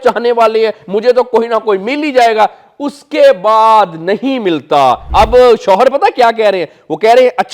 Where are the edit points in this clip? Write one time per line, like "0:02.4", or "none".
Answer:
0:05.0